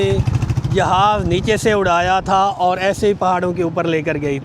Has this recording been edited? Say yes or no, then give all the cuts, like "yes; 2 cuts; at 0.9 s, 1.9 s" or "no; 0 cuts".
no; 0 cuts